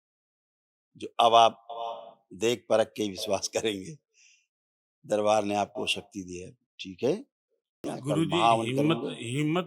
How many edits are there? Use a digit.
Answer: 1